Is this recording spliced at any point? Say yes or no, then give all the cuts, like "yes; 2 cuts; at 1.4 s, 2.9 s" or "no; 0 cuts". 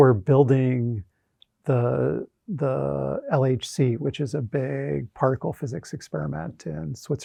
no; 0 cuts